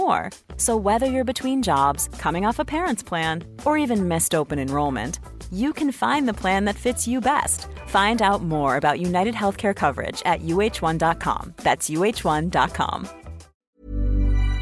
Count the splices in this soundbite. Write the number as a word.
one